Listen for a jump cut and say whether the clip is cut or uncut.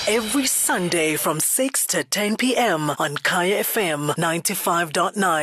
uncut